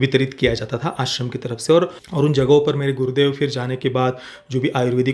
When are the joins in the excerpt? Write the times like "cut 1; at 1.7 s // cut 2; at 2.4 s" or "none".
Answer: cut 1; at 2.0 s